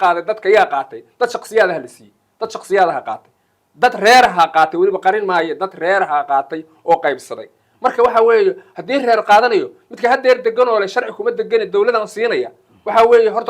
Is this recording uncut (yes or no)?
yes